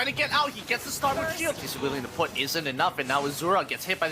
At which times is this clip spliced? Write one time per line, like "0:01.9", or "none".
0:01.7